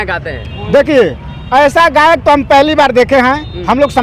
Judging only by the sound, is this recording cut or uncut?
uncut